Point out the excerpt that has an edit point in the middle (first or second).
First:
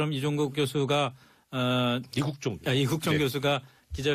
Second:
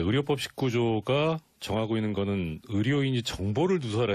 second